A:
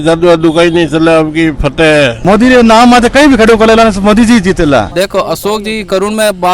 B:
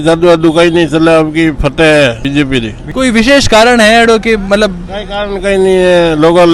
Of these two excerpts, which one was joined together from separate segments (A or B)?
A